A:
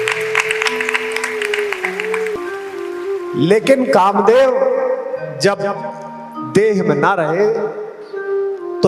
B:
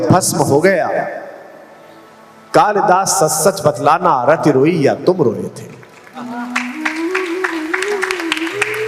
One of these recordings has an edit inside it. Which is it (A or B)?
A